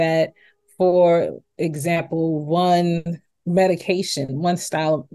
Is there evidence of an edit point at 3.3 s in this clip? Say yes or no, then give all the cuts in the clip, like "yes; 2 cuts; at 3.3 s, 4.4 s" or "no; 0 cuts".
yes; 1 cut; at 3.3 s